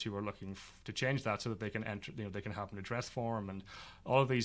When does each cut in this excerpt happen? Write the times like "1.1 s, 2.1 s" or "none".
none